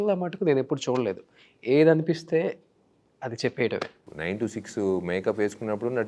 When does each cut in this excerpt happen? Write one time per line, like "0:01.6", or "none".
0:04.0